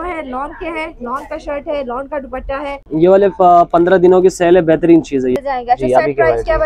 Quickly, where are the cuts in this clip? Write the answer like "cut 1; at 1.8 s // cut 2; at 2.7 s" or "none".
cut 1; at 2.8 s // cut 2; at 5.4 s